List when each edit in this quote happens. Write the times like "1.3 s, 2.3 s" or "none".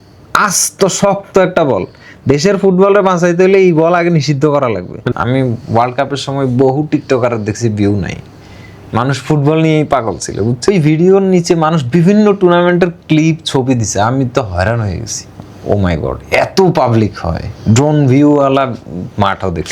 5.0 s, 10.7 s